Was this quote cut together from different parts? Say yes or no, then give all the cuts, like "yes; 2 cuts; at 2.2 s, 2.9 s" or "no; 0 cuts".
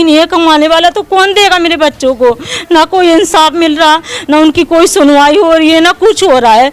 no; 0 cuts